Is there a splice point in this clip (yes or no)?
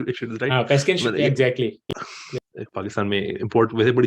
yes